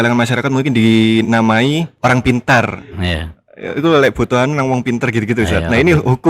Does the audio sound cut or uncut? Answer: cut